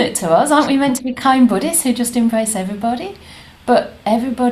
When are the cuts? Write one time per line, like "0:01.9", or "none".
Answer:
none